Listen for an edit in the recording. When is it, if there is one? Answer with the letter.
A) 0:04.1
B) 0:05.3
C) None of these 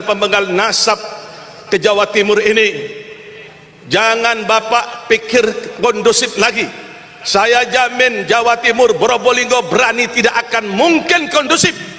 C